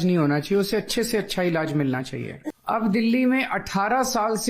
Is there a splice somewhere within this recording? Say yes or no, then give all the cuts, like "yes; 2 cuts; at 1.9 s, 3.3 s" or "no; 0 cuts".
yes; 1 cut; at 2.5 s